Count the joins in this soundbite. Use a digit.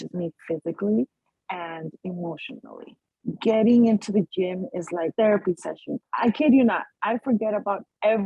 1